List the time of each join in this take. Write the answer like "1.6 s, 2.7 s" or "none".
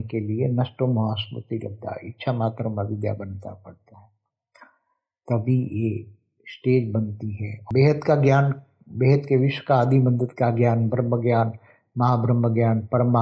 7.6 s